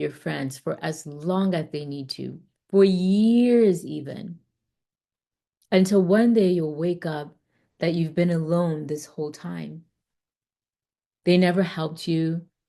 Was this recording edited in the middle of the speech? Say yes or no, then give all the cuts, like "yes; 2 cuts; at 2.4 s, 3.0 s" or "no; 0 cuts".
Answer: no; 0 cuts